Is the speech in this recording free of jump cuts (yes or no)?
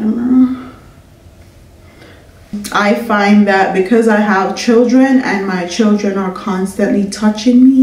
no